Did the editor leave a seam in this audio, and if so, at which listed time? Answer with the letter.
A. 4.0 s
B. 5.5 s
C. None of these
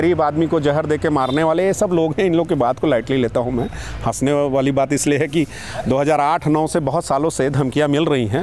C